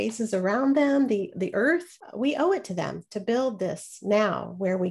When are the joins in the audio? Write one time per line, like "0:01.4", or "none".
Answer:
0:02.0